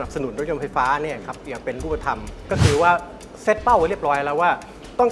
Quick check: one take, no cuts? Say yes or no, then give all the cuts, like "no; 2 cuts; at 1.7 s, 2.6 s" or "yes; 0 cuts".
no; 1 cut; at 2.4 s